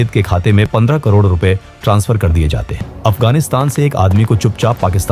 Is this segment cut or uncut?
cut